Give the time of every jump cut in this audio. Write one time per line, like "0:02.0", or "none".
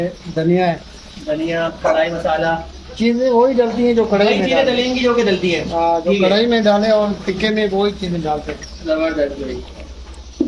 none